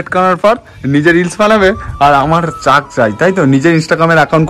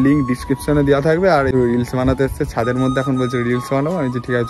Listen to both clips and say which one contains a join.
second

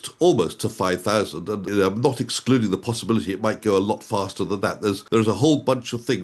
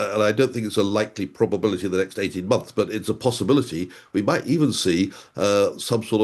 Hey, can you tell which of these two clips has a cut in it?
first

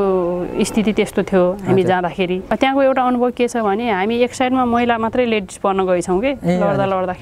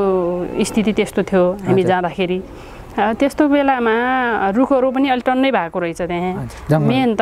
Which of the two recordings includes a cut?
first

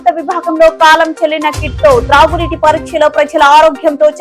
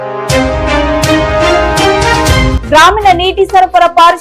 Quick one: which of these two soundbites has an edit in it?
second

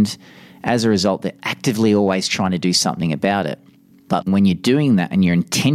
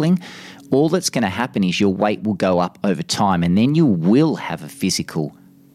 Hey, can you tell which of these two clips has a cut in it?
first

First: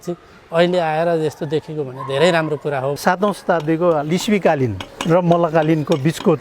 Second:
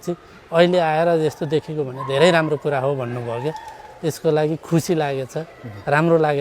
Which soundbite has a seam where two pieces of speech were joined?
first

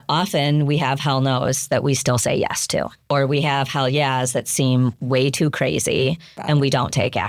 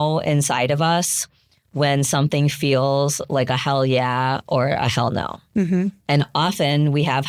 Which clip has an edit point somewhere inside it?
first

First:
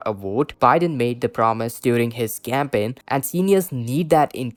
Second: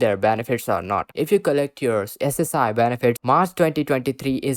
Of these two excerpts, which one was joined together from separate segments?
second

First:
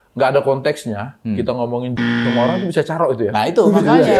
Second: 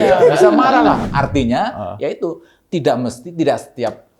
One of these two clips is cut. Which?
second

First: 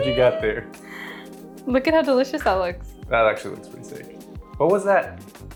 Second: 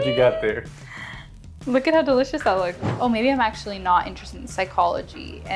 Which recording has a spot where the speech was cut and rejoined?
second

